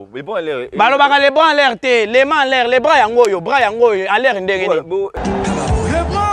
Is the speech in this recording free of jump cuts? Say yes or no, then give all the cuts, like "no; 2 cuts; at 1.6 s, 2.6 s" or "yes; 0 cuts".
no; 1 cut; at 5.1 s